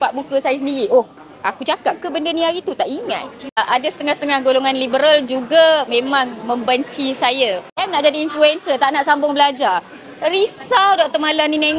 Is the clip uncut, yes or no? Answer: no